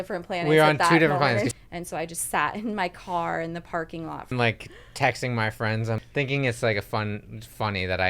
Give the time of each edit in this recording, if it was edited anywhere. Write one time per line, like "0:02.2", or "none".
0:01.5
0:04.3
0:06.0